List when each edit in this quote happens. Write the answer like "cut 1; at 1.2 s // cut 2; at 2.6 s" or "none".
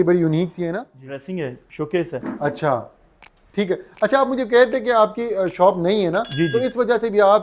cut 1; at 1.3 s